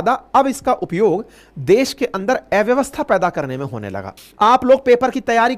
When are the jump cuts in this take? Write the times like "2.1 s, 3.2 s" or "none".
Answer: 4.0 s